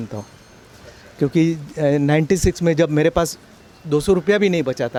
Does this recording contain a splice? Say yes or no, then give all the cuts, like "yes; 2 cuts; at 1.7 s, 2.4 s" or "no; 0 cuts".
no; 0 cuts